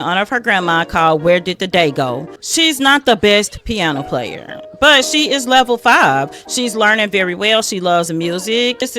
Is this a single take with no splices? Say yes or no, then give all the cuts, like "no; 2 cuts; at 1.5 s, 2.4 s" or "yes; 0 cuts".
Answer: yes; 0 cuts